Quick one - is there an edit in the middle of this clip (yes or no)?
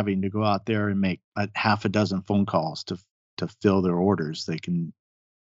no